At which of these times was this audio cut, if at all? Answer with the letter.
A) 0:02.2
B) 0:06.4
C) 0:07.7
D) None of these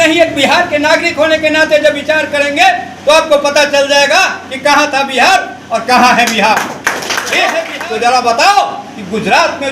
C